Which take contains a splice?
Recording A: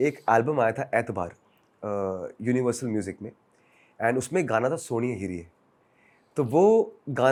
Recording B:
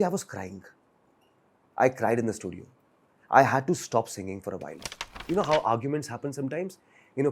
B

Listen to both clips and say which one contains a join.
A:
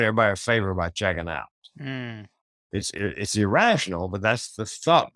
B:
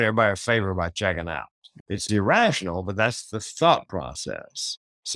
B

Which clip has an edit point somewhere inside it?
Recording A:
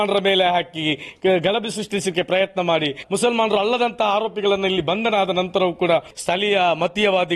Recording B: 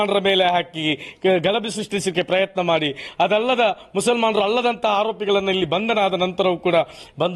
A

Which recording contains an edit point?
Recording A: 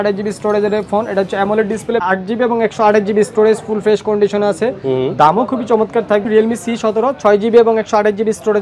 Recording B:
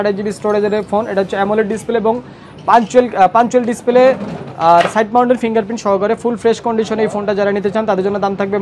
A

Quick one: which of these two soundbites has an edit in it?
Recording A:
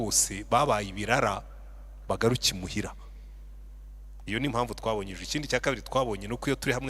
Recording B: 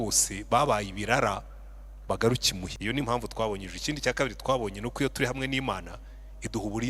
B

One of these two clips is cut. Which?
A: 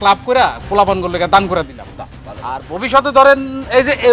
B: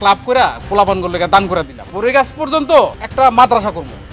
B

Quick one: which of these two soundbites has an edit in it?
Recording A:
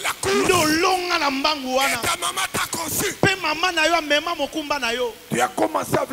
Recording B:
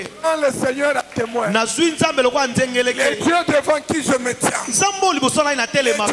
A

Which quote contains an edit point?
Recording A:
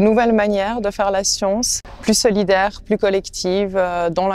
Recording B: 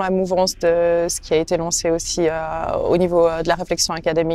A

